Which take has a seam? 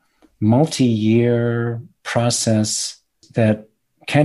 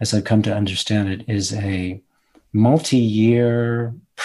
first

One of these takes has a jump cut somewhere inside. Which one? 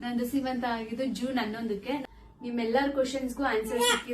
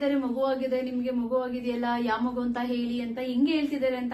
first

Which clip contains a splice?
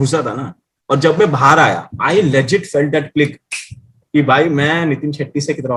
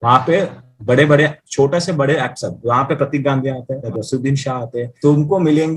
second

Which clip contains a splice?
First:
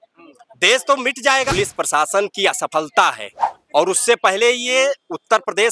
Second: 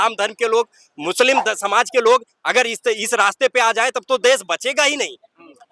first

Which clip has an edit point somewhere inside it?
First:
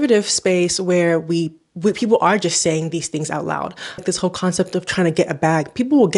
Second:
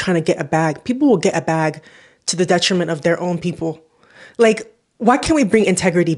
first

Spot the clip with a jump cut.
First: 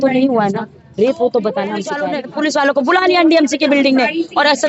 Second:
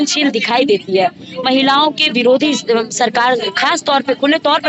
first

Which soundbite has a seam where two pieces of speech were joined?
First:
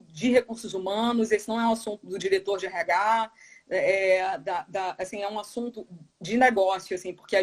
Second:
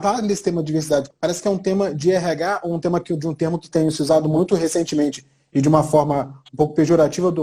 second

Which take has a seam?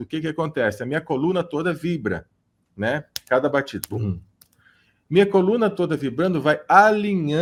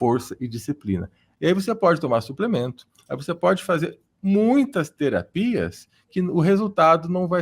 second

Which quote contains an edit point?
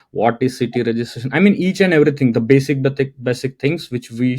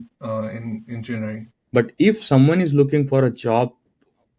second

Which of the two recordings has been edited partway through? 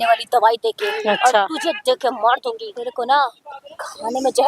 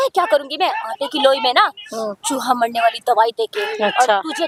first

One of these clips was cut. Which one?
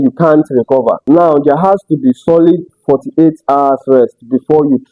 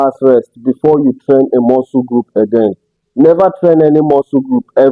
first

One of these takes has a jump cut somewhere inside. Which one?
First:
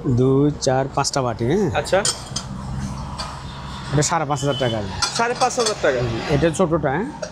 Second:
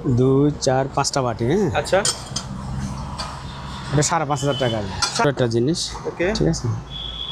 second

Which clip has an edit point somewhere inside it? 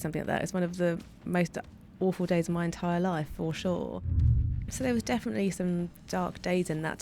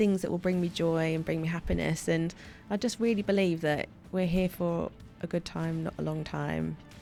first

